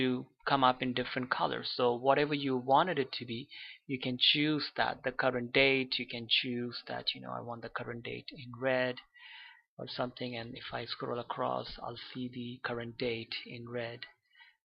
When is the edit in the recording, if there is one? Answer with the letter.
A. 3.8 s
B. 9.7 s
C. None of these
B